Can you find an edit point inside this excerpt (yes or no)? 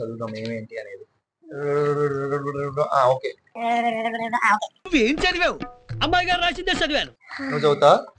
no